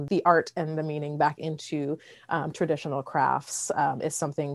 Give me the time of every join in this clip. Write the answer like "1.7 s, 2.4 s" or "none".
none